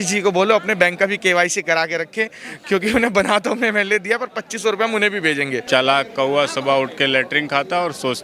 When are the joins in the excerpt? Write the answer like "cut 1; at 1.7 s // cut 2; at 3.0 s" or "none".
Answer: cut 1; at 5.6 s